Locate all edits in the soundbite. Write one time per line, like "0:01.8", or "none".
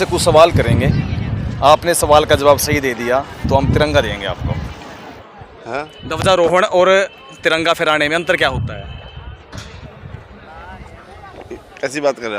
0:05.1

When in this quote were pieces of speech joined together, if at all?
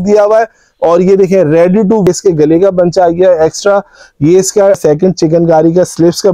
0:02.1
0:04.8

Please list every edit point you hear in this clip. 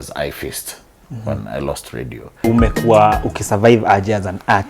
0:02.5

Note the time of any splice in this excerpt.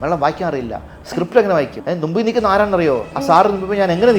0:01.8
0:03.1

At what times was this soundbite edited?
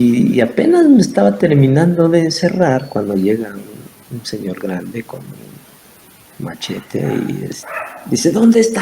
0:07.6

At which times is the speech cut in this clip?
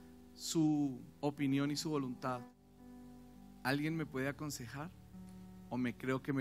0:02.6

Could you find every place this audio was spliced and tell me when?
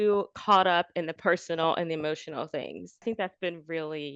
0:03.0

